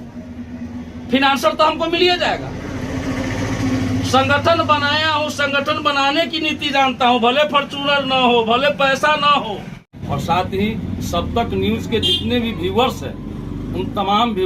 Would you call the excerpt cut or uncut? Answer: cut